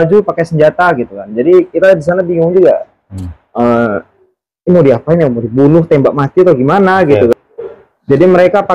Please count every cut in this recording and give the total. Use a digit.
1